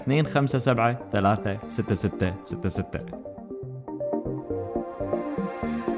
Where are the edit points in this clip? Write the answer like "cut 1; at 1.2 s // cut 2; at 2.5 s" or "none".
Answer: cut 1; at 3.0 s